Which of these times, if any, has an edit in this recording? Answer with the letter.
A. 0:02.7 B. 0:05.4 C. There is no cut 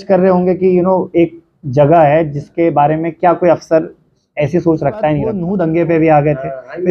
B